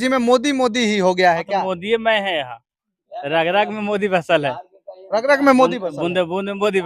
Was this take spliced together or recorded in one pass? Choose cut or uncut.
uncut